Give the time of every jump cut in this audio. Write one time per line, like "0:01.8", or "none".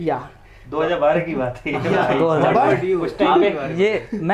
none